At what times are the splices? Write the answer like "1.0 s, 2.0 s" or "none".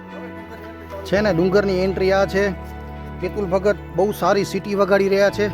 1.0 s